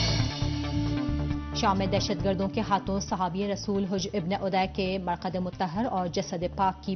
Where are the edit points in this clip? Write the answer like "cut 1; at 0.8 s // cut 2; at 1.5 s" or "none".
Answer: cut 1; at 5.5 s